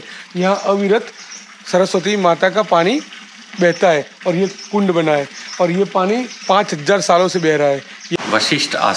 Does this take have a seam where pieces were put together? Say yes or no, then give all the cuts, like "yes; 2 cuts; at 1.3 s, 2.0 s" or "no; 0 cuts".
yes; 1 cut; at 8.0 s